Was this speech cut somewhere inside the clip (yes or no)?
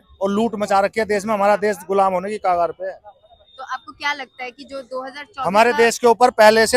no